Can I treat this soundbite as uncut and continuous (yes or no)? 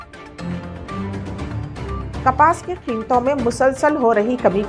no